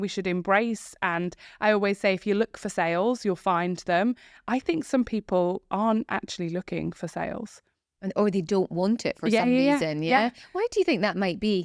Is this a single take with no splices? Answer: yes; 0 cuts

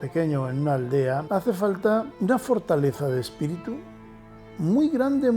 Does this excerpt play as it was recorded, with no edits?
no; 2 cuts; at 1.2 s, 2.1 s

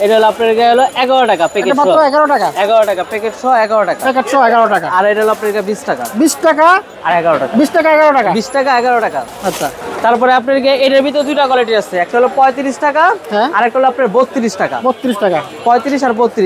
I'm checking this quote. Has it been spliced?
no; 0 cuts

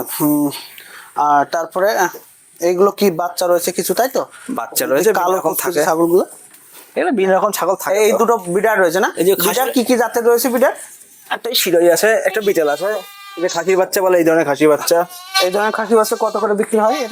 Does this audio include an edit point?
no; 0 cuts

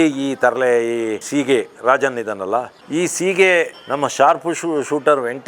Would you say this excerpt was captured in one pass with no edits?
no; 2 cuts; at 1.2 s, 2.8 s

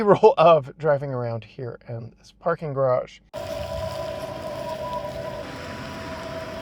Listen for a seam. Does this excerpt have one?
yes; 1 cut; at 5.4 s

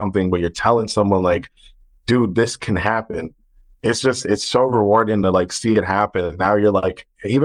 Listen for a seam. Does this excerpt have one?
no; 0 cuts

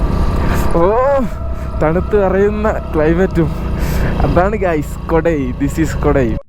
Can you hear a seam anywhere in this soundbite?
no; 0 cuts

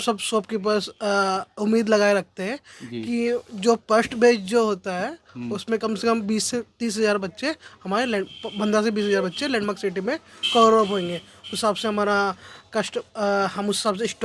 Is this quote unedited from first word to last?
yes; 0 cuts

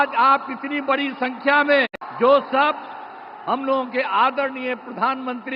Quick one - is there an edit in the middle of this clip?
no; 0 cuts

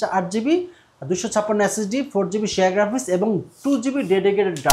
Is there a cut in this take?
no; 0 cuts

